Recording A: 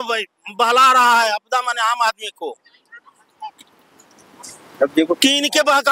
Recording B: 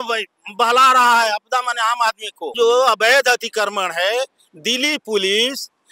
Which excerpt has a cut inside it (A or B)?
B